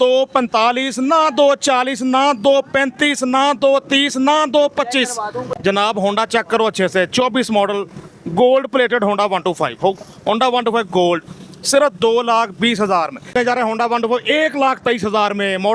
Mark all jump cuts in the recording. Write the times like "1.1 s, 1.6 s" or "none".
5.4 s, 13.3 s